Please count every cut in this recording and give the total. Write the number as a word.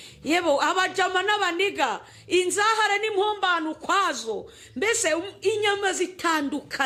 zero